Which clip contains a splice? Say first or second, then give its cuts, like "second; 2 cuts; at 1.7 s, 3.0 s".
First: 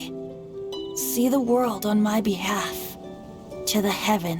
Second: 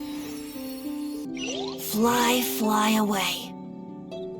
second; 1 cut; at 1.3 s